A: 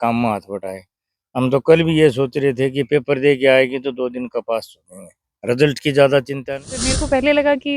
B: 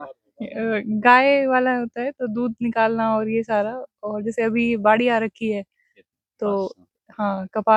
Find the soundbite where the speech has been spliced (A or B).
A